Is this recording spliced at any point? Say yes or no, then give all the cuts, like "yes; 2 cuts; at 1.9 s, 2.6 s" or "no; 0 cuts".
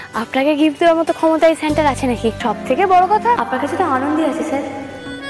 yes; 2 cuts; at 2.4 s, 3.4 s